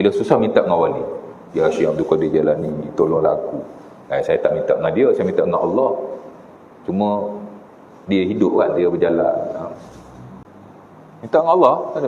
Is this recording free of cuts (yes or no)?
no